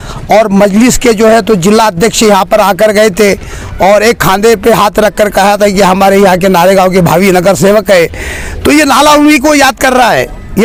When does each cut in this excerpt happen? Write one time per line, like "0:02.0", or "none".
none